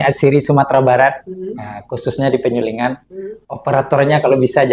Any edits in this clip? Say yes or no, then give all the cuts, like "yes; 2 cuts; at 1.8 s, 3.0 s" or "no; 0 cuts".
no; 0 cuts